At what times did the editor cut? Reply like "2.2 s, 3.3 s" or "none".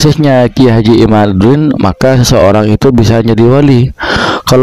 none

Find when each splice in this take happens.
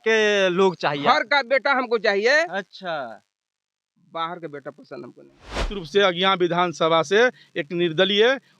5.8 s

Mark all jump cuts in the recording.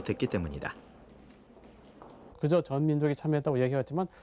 2.8 s

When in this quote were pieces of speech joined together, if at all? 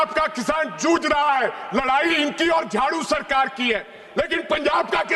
none

